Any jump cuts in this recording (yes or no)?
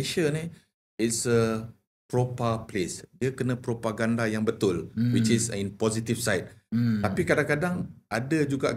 no